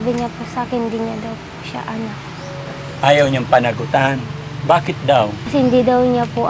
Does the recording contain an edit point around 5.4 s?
yes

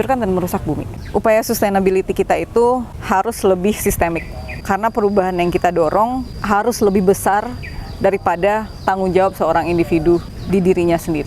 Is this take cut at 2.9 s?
yes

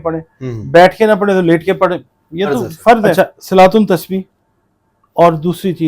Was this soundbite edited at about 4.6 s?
no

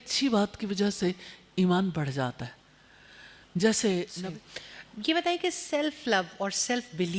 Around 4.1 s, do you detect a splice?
yes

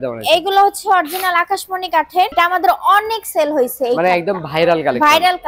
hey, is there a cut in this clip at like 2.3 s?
yes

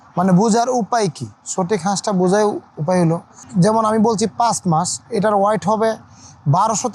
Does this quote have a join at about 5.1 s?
no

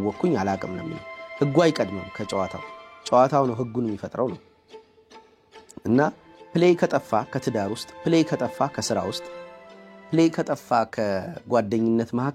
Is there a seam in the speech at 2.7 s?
no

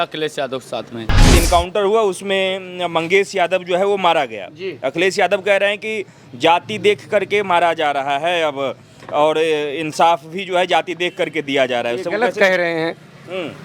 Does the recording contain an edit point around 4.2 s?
no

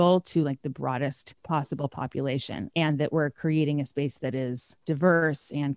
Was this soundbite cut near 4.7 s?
yes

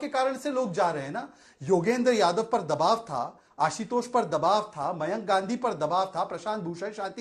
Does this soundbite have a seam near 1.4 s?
no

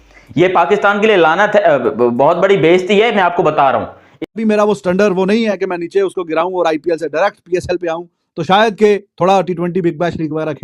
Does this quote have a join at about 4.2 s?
yes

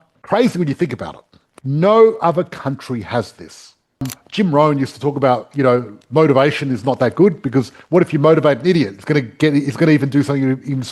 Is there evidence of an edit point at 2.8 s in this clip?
no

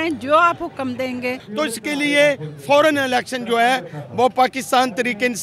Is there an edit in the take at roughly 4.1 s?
no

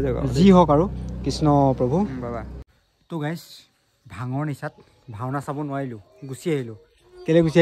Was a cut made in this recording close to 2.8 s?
yes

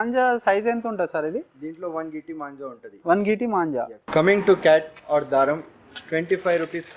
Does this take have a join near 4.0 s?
yes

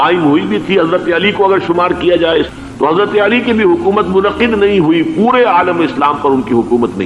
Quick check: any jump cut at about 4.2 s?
no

